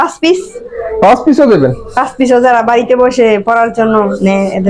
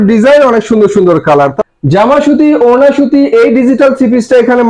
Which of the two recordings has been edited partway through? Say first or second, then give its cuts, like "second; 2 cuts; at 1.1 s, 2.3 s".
second; 1 cut; at 1.6 s